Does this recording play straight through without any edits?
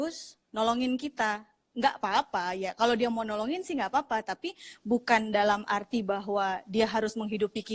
yes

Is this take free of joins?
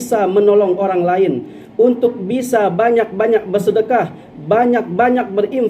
yes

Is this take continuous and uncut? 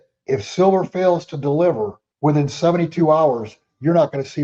no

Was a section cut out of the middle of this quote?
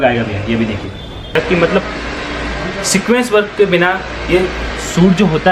yes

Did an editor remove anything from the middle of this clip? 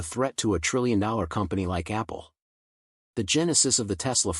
yes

